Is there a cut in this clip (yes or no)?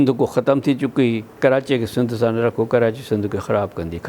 yes